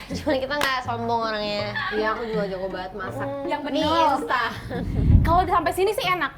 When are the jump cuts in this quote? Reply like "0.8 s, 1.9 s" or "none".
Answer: 5.1 s